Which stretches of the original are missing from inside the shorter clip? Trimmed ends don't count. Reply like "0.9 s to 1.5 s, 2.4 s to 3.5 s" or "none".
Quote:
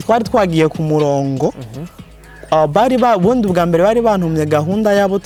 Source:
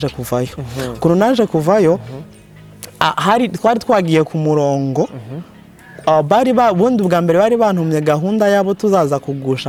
none